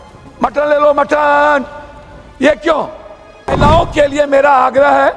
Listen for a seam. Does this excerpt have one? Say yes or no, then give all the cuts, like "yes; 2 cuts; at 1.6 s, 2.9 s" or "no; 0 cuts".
yes; 1 cut; at 3.5 s